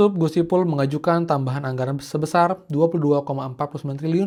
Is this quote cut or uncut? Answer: uncut